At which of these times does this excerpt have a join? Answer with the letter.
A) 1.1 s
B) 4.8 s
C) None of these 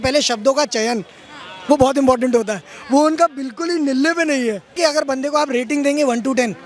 B